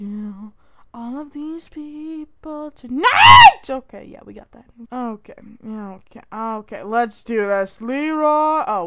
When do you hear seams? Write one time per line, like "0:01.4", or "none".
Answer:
none

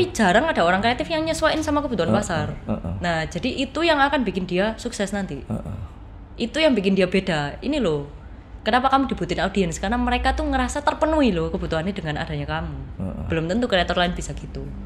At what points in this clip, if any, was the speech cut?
none

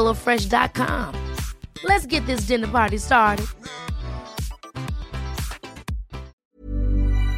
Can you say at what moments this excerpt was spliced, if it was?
0:06.4

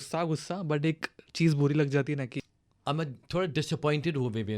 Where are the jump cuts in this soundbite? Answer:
0:02.4

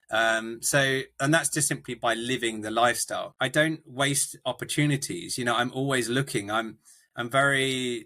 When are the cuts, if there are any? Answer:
0:03.3

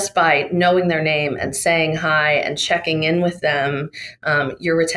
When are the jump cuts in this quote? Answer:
none

